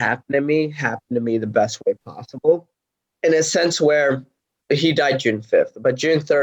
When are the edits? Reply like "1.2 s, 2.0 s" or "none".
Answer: 4.5 s

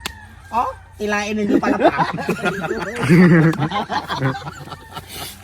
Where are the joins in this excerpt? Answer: none

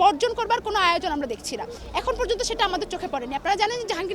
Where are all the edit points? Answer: none

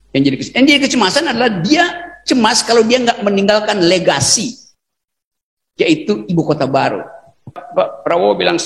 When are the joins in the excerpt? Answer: 7.6 s

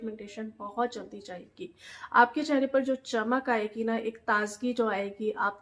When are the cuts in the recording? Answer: none

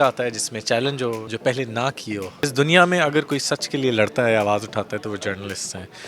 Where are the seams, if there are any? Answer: 1.3 s, 2.4 s

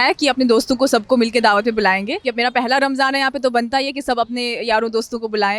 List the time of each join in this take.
2.2 s

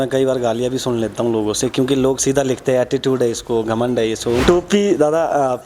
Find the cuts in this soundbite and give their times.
4.4 s

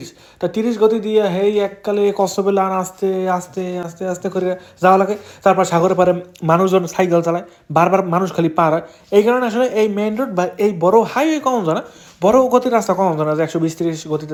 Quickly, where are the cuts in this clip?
none

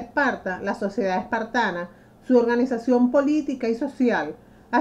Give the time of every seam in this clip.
1.7 s

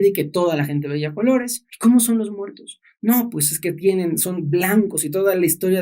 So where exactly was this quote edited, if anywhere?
1.6 s

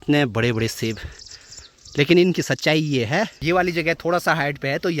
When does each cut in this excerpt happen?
3.4 s

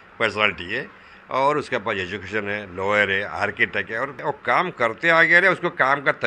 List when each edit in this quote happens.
4.2 s

